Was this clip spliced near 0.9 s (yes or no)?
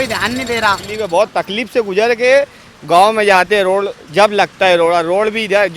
yes